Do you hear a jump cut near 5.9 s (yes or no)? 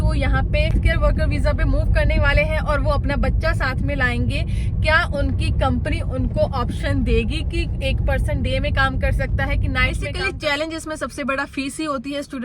no